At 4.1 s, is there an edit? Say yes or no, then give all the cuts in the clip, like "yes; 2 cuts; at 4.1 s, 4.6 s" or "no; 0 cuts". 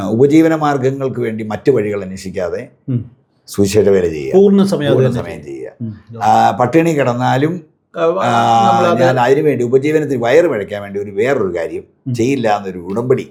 no; 0 cuts